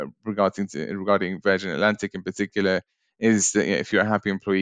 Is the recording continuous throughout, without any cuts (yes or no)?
yes